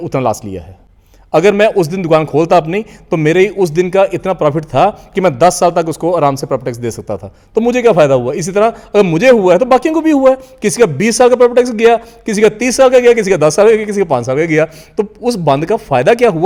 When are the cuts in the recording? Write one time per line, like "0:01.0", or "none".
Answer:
none